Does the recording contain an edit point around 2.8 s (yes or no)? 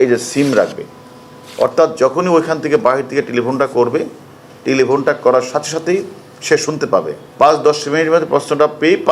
no